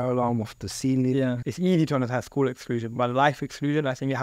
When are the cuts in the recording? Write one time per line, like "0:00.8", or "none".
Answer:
0:01.5